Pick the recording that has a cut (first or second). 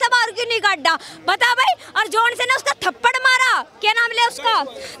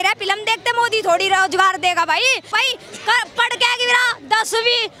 second